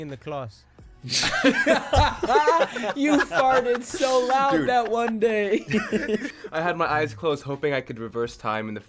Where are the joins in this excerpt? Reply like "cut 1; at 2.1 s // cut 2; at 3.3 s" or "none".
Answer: cut 1; at 6.3 s